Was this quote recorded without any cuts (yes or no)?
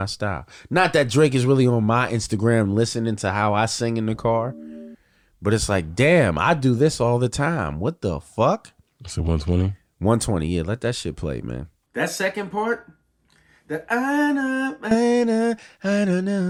yes